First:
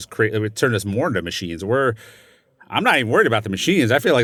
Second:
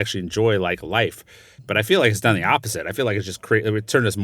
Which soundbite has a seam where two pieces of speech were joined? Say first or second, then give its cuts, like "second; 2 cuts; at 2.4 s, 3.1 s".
second; 1 cut; at 1.6 s